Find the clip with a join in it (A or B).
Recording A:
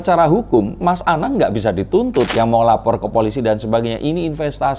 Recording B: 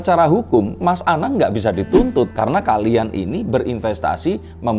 A